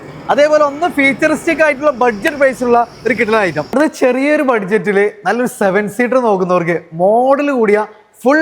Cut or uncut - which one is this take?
cut